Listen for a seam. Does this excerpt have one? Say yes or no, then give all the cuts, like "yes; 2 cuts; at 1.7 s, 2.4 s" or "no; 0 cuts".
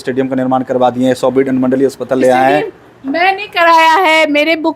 no; 0 cuts